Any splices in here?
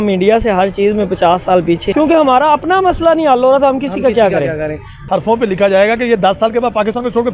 yes; 2 cuts; at 1.9 s, 4.9 s

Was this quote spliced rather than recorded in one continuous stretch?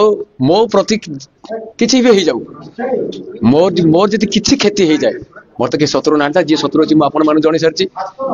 no; 0 cuts

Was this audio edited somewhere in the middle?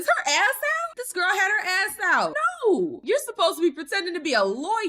yes; 3 cuts; at 0.9 s, 2.4 s, 3.0 s

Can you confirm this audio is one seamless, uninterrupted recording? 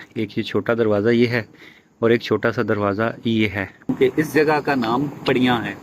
no; 1 cut; at 3.9 s

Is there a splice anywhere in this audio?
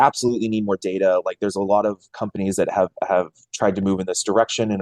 no; 0 cuts

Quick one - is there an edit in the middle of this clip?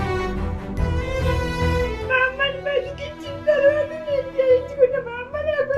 yes; 1 cut; at 2.0 s

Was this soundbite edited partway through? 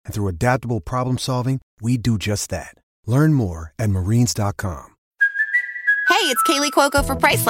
yes; 1 cut; at 5.1 s

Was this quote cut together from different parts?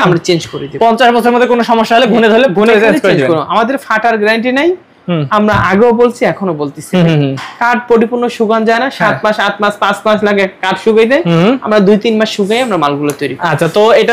no; 0 cuts

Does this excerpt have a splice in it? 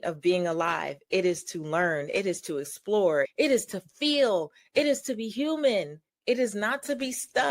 yes; 2 cuts; at 3.3 s, 6.0 s

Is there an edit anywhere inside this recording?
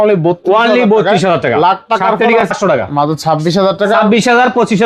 yes; 1 cut; at 2.5 s

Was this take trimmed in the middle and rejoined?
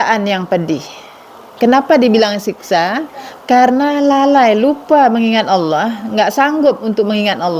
no; 0 cuts

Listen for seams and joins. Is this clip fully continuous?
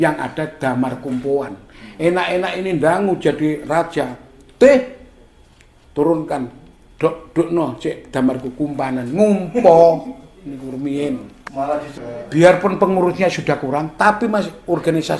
no; 1 cut; at 11.9 s

